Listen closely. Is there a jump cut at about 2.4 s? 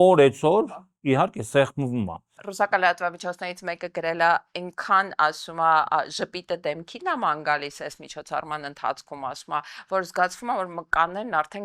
yes; 1 cut; at 2.4 s

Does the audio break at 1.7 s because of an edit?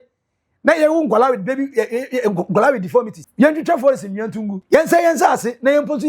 no; 2 cuts; at 3.2 s, 4.5 s

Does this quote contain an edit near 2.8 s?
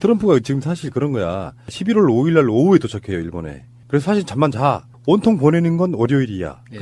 no; 1 cut; at 5.7 s

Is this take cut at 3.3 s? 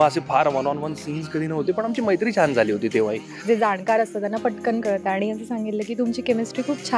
yes; 1 cut; at 3.3 s

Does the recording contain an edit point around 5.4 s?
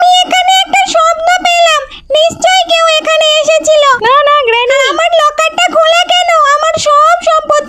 no; 0 cuts

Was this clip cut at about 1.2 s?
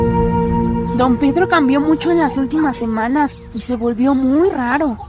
no; 0 cuts

